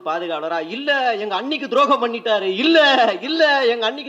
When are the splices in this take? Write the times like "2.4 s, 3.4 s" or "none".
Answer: none